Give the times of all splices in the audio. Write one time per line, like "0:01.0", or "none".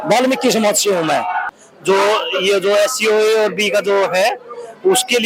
0:01.6